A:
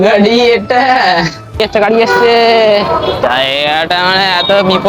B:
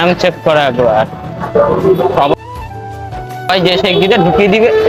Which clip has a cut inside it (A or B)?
A